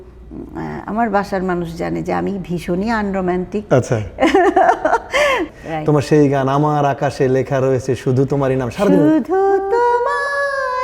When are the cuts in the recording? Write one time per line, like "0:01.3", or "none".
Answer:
0:05.5

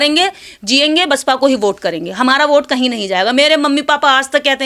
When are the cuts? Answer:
none

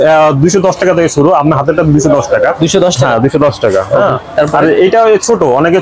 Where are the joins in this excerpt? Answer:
none

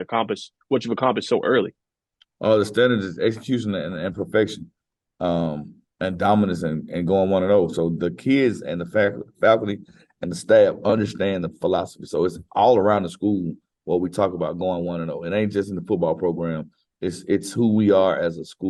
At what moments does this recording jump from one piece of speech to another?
none

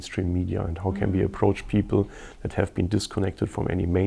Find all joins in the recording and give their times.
none

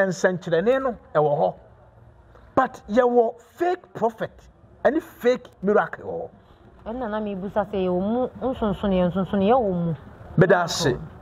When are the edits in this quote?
none

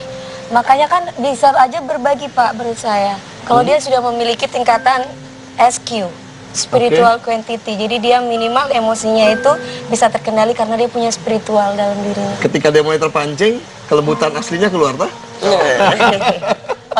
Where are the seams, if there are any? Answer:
none

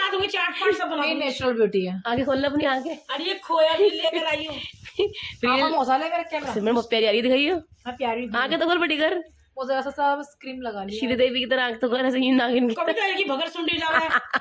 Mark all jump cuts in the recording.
none

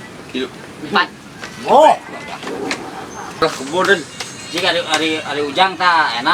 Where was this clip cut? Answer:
0:03.4

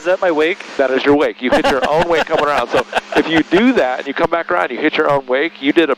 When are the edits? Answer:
none

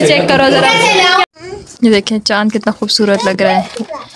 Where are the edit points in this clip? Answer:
0:01.3

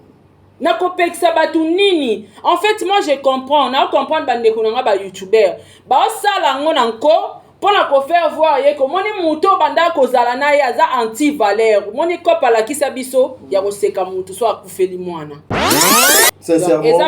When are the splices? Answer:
0:15.8

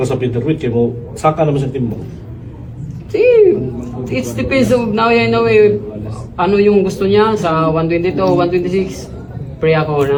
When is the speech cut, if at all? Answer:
none

